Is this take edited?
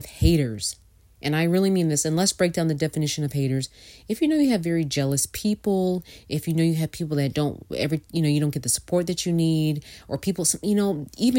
no; 0 cuts

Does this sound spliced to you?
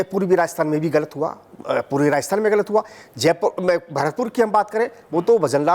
no; 0 cuts

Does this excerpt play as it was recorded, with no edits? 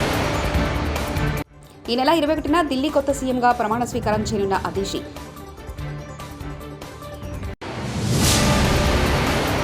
no; 1 cut; at 1.3 s

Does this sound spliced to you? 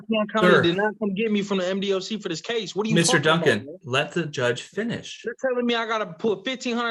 no; 0 cuts

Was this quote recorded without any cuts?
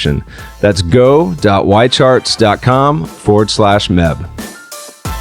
no; 1 cut; at 4.3 s

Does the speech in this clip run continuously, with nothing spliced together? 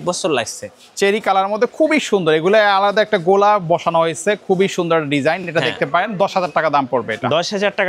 yes; 0 cuts

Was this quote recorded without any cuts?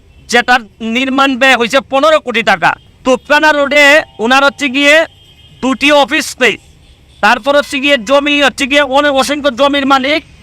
yes; 0 cuts

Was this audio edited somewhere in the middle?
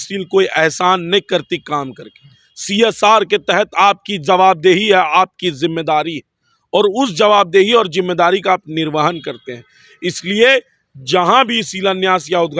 no; 0 cuts

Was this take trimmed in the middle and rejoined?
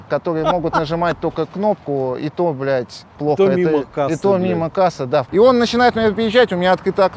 yes; 1 cut; at 5.3 s

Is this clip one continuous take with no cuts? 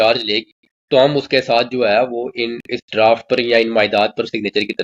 yes; 0 cuts

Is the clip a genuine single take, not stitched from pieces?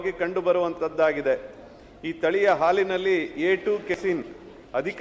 no; 1 cut; at 4.0 s

